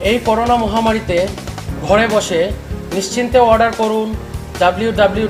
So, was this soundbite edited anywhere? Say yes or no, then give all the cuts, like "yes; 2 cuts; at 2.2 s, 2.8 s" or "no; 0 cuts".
no; 0 cuts